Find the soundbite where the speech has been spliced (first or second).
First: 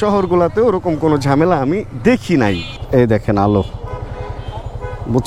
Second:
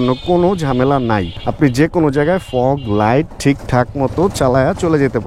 first